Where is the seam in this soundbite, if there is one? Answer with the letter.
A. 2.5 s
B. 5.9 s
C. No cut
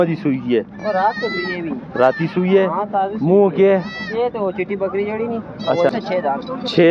B